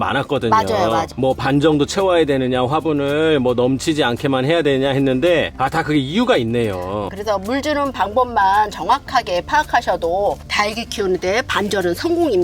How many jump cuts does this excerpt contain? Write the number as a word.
three